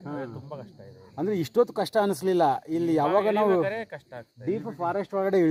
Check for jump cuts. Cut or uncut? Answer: uncut